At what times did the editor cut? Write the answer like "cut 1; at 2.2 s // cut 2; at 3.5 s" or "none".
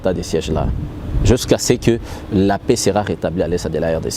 none